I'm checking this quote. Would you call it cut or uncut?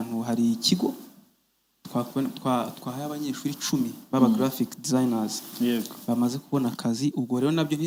uncut